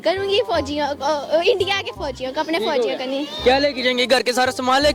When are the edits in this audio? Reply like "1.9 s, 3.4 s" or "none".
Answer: none